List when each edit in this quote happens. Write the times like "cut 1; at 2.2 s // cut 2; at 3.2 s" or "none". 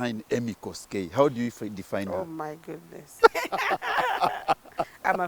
cut 1; at 3.1 s